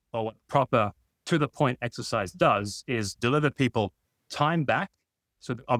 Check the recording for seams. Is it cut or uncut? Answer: cut